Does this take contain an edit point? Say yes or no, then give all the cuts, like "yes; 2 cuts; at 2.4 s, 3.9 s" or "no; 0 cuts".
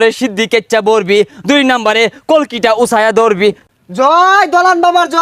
yes; 1 cut; at 3.6 s